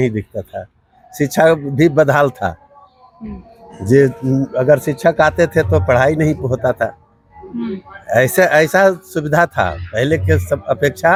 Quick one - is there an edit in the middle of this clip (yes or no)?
no